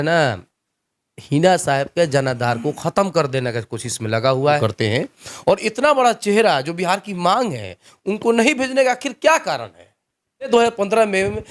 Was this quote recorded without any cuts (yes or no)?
no